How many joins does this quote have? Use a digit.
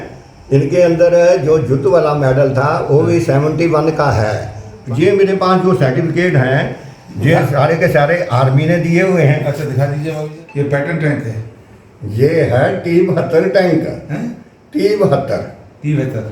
2